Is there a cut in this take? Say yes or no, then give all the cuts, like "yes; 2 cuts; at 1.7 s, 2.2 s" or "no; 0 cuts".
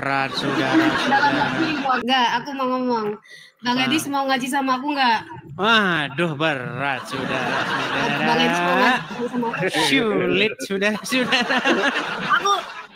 yes; 1 cut; at 2.0 s